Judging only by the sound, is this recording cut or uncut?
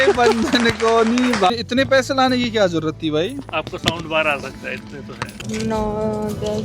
cut